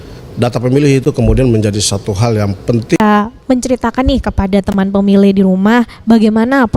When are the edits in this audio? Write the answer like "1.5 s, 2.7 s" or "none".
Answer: 3.0 s